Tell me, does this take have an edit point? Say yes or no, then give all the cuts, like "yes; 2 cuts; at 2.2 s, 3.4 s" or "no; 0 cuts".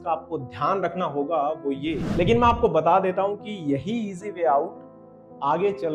yes; 1 cut; at 2.1 s